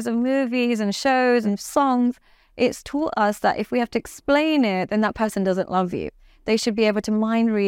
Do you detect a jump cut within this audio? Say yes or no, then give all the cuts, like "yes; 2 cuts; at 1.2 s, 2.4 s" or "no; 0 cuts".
yes; 1 cut; at 1.5 s